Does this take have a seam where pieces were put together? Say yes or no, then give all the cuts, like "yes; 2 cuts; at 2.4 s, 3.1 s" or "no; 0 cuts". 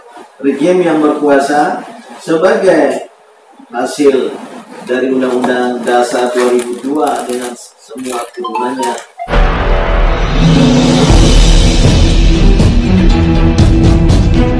yes; 1 cut; at 9.1 s